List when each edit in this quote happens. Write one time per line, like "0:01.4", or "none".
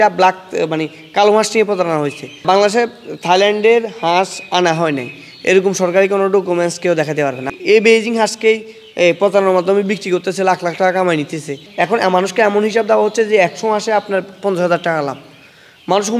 0:02.4
0:07.5
0:11.6